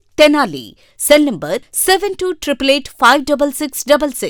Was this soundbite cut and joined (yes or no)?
no